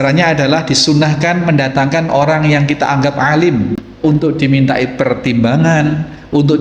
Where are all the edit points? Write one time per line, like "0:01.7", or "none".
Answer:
0:04.0

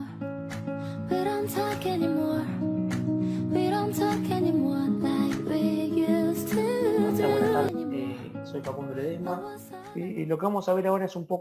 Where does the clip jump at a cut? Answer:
0:07.7

